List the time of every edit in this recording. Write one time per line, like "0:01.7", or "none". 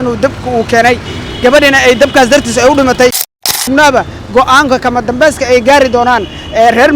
0:03.6